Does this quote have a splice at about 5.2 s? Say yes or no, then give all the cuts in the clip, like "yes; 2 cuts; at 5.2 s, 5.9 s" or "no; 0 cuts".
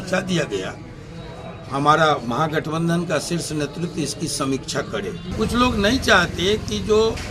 yes; 1 cut; at 5.2 s